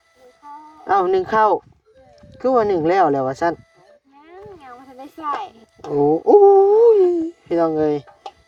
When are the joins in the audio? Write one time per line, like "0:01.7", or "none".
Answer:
none